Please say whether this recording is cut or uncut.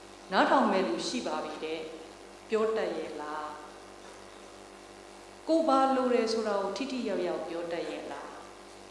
uncut